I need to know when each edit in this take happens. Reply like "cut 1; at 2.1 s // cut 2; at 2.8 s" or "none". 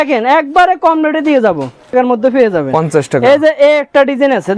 cut 1; at 1.9 s